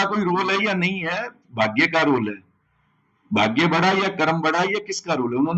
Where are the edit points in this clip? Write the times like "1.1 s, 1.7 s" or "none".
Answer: none